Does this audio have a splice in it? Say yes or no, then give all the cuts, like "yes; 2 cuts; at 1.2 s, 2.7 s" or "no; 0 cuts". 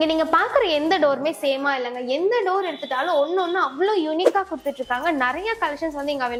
no; 0 cuts